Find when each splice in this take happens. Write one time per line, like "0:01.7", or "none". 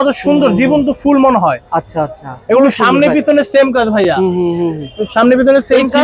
none